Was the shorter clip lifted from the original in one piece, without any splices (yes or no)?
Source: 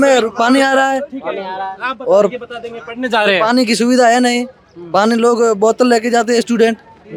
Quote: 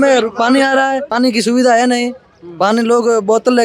no